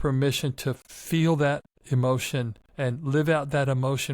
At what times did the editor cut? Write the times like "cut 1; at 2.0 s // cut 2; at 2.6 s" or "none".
cut 1; at 0.9 s // cut 2; at 1.7 s // cut 3; at 2.6 s